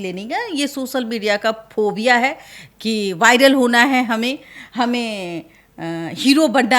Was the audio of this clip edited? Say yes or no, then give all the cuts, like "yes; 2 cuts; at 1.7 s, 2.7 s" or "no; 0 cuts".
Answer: no; 0 cuts